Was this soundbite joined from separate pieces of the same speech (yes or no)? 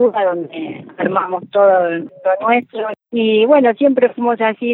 yes